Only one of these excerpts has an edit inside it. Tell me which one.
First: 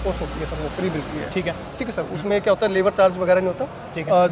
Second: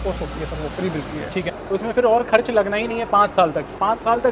second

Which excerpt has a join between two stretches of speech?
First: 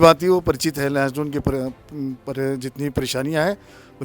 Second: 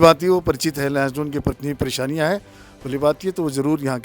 second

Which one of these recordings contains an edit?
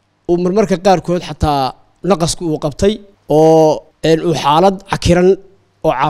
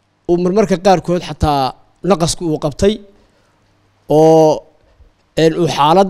first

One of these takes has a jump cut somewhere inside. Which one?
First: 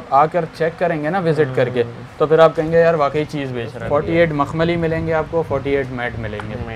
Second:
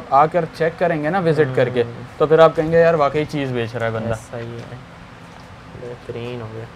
first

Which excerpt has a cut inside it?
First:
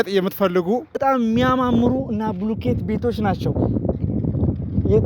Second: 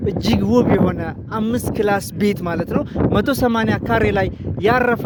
first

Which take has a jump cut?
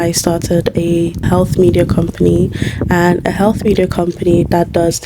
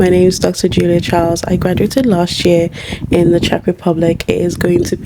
first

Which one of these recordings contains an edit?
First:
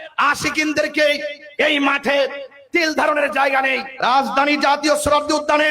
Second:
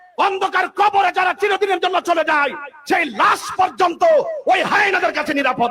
first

